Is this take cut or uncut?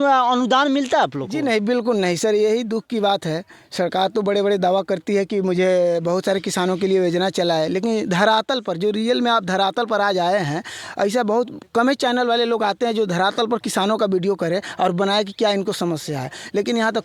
uncut